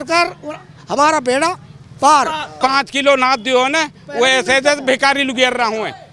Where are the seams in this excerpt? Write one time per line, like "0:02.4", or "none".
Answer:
0:02.6